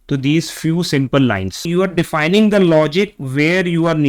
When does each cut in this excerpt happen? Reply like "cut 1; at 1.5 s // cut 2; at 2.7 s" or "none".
cut 1; at 1.7 s